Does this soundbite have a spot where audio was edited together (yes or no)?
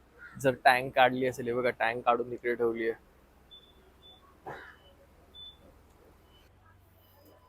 yes